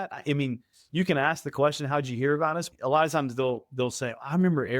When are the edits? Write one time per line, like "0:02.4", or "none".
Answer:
0:02.7